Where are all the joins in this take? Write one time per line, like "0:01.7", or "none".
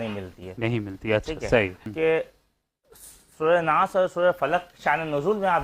0:01.9